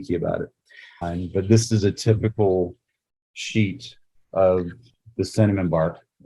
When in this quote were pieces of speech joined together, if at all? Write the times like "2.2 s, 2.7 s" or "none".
1.0 s